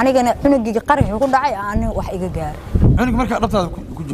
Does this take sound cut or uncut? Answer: uncut